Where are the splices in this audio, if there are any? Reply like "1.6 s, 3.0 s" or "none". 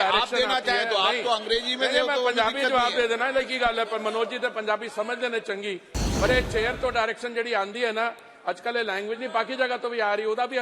none